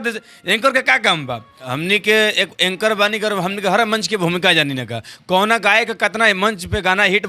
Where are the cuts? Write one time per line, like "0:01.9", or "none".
0:01.6